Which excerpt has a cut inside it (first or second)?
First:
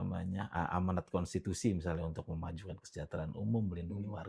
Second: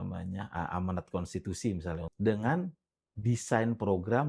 second